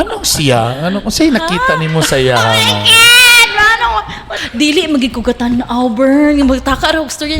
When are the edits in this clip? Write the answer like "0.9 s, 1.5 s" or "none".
4.3 s

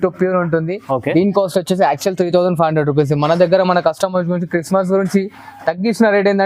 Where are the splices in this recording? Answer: none

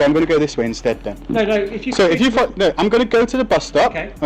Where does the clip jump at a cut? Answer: none

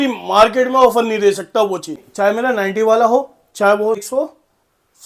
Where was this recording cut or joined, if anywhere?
2.0 s, 4.0 s

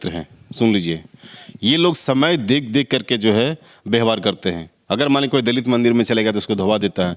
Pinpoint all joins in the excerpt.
none

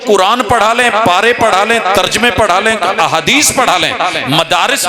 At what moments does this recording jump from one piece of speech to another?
none

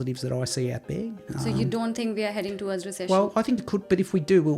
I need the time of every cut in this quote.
1.2 s

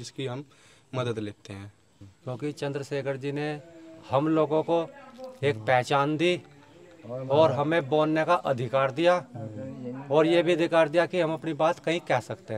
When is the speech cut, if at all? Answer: 1.9 s

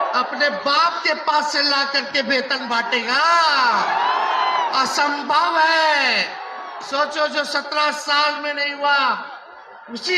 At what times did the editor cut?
none

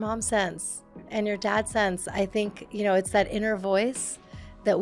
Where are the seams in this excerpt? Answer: 1.0 s

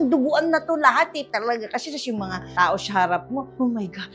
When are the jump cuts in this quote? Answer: 1.3 s

